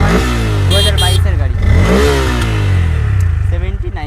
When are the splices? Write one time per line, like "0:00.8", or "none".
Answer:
none